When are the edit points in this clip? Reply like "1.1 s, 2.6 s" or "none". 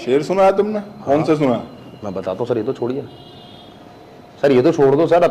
none